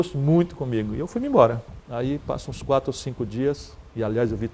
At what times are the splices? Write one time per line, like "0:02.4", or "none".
none